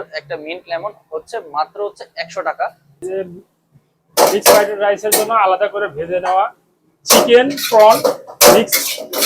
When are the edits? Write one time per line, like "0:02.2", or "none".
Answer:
0:02.9